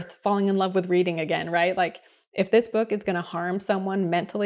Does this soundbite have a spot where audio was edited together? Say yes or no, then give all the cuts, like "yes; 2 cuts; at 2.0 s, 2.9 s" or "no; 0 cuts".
no; 0 cuts